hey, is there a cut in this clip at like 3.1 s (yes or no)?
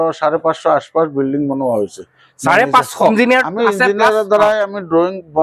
yes